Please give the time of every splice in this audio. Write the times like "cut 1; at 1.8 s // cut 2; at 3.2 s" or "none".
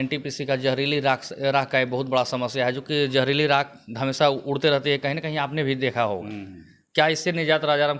none